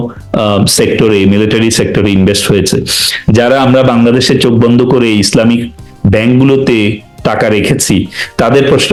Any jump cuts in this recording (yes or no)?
no